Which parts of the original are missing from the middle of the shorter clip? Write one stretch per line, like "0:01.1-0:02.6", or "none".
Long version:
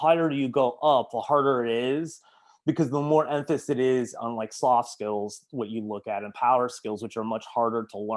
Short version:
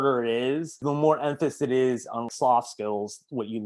0:02.2-0:02.9
0:04.4-0:04.5